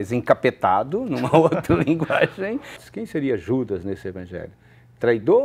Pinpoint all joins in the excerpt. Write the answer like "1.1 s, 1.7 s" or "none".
2.8 s